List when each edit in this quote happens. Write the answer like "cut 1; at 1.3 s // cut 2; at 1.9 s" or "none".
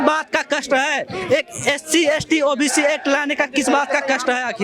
none